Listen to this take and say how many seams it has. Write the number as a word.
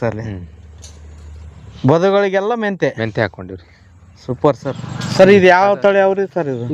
one